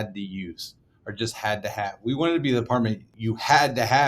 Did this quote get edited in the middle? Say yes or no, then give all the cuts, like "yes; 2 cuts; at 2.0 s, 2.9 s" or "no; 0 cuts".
yes; 1 cut; at 3.1 s